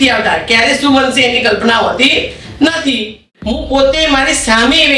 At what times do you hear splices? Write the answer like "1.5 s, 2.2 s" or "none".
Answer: 3.3 s

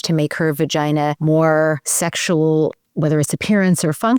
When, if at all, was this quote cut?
1.2 s, 1.9 s

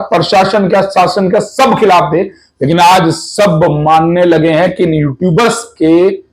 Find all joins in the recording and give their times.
none

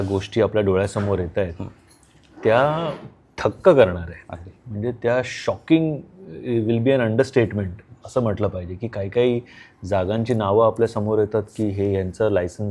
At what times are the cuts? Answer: none

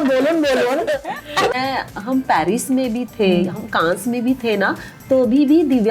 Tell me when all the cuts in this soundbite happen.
1.5 s

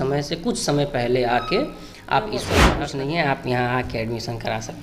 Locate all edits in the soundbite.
2.7 s

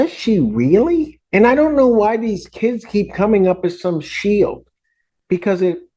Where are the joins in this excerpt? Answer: 1.2 s

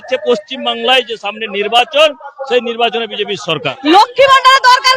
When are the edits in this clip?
3.5 s

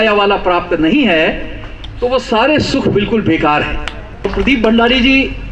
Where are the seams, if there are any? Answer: 4.3 s

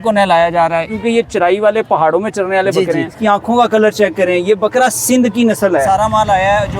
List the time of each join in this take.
0.9 s, 3.1 s, 5.9 s

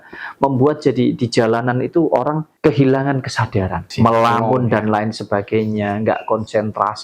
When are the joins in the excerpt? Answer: 2.5 s, 3.8 s

